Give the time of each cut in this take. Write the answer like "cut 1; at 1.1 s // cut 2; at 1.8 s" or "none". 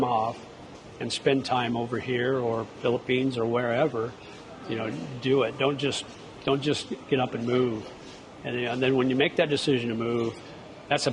none